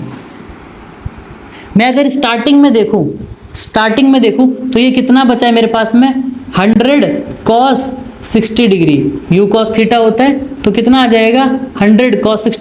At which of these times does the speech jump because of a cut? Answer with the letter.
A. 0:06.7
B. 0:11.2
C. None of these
C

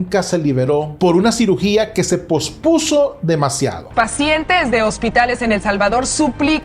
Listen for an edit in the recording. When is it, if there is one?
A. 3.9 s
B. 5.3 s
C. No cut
A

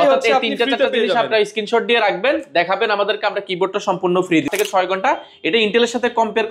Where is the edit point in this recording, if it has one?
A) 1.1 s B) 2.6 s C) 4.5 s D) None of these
C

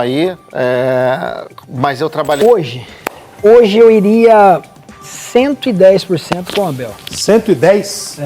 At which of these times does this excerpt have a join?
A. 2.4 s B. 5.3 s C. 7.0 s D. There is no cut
A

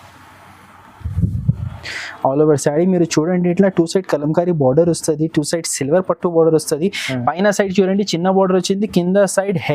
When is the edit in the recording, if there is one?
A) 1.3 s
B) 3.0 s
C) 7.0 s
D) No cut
D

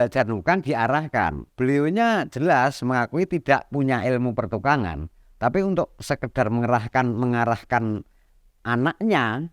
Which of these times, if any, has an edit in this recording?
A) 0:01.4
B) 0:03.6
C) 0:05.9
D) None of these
A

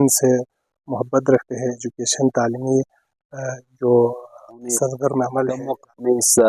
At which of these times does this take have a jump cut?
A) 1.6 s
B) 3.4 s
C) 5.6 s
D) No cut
C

